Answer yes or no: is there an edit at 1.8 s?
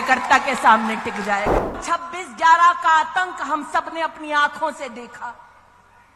yes